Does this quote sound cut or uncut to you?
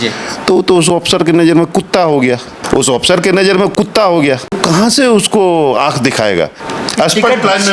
cut